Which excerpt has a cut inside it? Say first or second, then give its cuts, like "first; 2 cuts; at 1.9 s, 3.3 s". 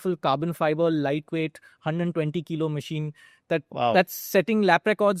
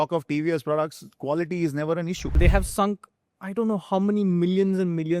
second; 1 cut; at 2.4 s